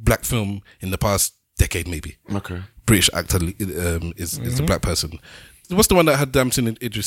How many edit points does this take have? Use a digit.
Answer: 1